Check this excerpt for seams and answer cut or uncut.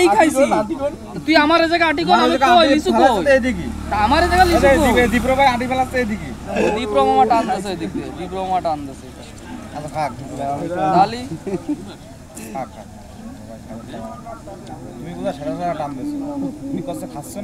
uncut